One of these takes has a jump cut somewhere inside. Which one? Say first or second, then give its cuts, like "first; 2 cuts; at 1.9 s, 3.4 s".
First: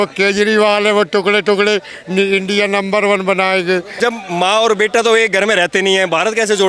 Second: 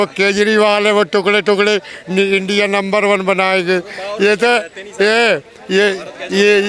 first; 1 cut; at 4.0 s